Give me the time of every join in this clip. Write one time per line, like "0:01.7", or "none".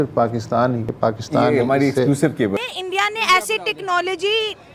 0:00.9
0:02.6

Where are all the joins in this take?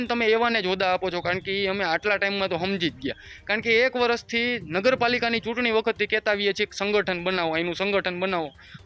none

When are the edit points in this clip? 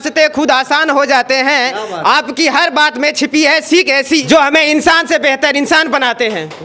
0:04.2

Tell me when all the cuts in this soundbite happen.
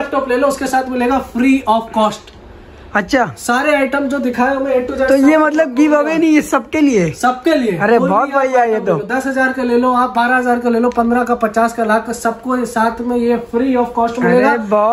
none

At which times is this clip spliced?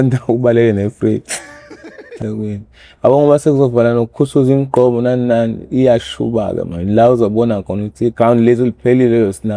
0:02.1

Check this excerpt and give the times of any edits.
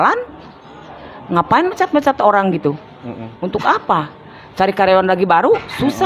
none

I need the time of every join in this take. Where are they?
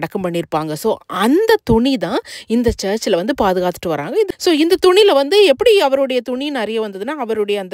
0:04.3

